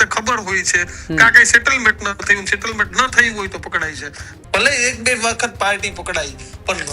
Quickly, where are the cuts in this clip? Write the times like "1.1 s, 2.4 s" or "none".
4.3 s